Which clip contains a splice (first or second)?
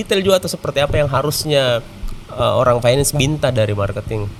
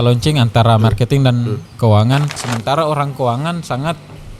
second